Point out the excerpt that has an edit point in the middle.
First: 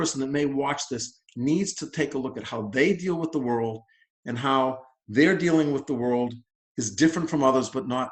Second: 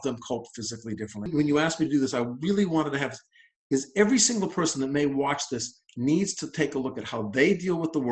second; 1 cut; at 1.3 s

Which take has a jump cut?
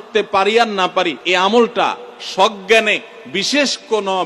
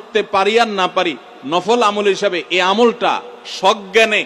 first; 1 cut; at 1.2 s

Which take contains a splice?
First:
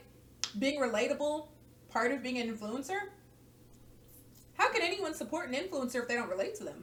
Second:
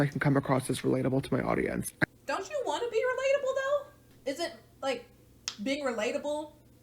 second; 2 cuts; at 2.0 s, 4.0 s

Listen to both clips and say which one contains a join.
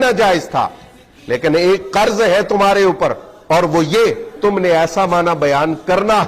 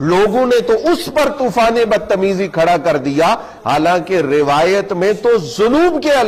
first; 1 cut; at 4.3 s

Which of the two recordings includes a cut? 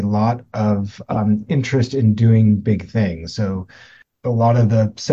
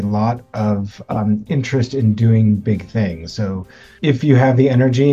second; 1 cut; at 3.9 s

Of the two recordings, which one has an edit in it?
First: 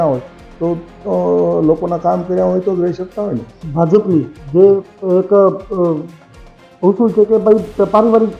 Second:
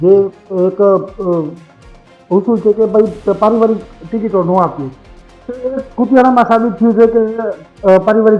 first; 1 cut; at 3.6 s

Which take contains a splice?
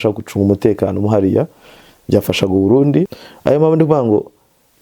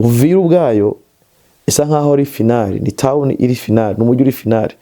first; 1 cut; at 3.2 s

